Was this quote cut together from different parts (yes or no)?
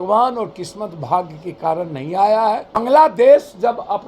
yes